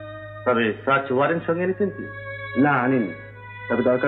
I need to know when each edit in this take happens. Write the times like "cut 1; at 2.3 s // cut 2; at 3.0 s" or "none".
none

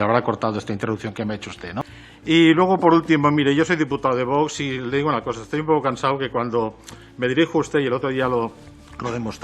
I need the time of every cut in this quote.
cut 1; at 1.8 s

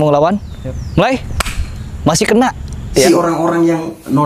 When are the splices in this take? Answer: cut 1; at 3.0 s

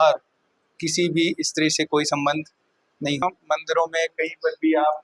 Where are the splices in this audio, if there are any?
cut 1; at 3.2 s

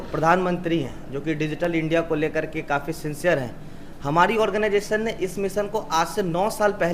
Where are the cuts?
none

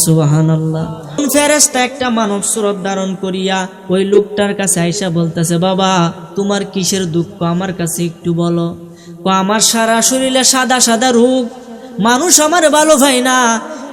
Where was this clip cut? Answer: cut 1; at 1.2 s

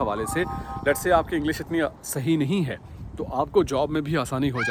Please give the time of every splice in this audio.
none

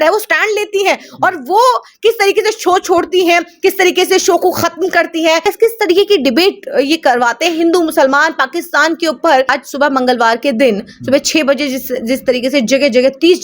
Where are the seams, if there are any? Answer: cut 1; at 5.4 s // cut 2; at 9.5 s

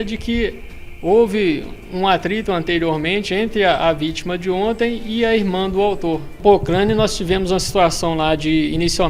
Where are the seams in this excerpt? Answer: cut 1; at 6.3 s

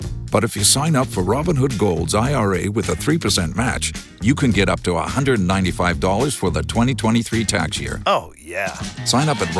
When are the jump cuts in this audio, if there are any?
none

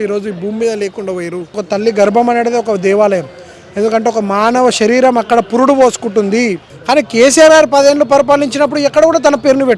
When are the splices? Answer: cut 1; at 1.6 s // cut 2; at 6.7 s

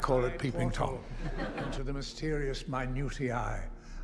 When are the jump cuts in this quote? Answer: cut 1; at 1.7 s

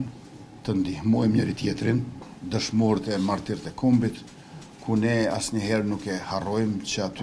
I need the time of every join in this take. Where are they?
cut 1; at 2.3 s

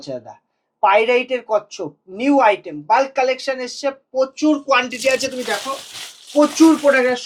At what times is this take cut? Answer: none

